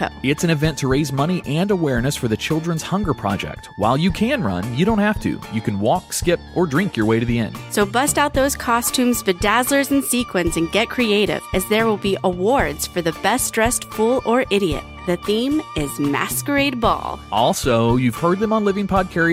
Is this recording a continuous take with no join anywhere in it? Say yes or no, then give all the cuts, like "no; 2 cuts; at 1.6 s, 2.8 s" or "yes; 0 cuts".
yes; 0 cuts